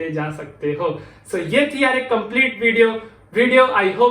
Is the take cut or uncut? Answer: uncut